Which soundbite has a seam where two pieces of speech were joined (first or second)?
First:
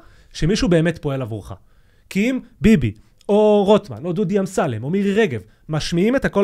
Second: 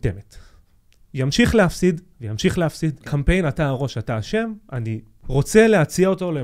second